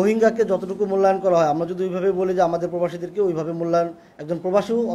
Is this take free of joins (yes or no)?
yes